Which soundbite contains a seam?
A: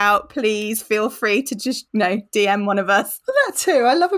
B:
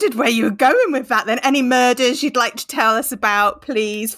A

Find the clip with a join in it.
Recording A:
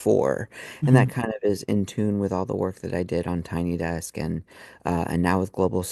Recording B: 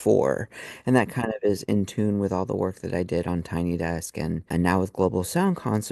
B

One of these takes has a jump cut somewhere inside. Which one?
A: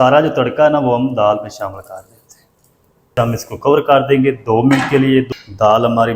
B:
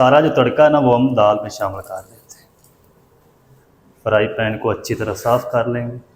A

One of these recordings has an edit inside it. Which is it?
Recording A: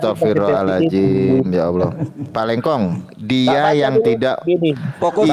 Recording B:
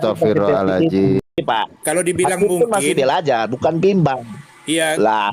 B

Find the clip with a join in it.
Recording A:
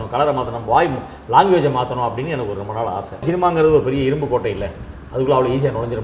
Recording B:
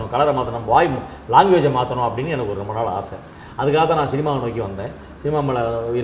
A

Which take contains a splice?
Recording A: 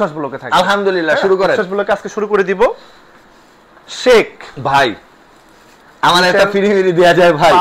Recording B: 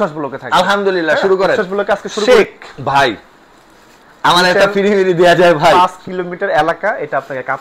B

